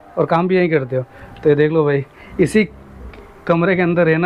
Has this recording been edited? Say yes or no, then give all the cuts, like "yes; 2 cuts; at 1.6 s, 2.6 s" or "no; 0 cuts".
no; 0 cuts